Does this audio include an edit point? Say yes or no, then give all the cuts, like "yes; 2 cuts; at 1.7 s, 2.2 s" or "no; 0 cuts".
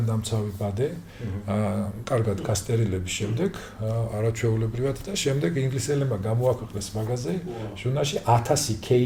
no; 0 cuts